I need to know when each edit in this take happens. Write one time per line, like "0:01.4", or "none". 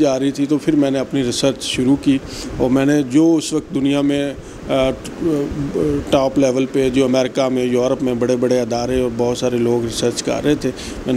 none